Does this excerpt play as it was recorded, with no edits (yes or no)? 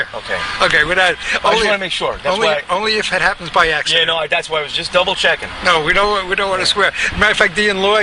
no